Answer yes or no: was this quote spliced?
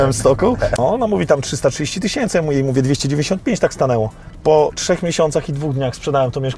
yes